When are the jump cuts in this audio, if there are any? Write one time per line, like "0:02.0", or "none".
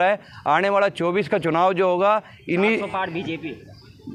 none